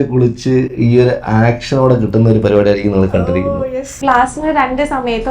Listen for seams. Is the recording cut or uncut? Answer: cut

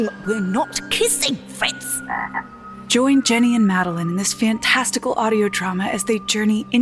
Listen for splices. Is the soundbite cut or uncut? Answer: uncut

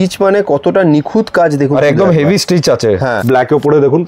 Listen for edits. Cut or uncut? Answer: cut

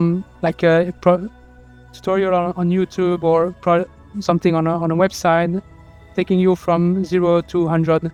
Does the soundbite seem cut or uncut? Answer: uncut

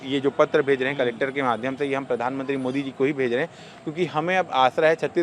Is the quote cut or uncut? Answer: uncut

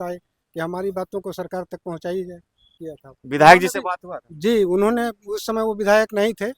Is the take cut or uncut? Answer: cut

